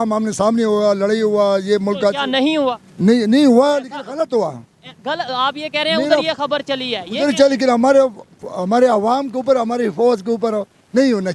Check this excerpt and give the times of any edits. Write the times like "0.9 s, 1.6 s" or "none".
none